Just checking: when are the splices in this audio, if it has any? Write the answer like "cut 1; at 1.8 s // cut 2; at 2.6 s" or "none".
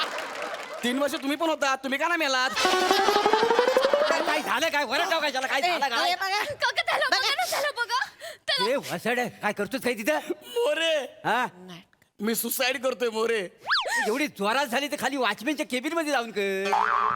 cut 1; at 4.3 s